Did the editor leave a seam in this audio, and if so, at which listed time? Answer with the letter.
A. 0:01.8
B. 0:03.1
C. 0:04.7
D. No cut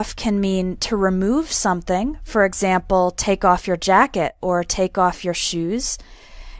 A